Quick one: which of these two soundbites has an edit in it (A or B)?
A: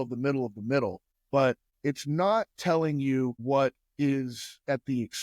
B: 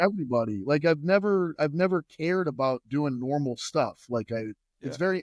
A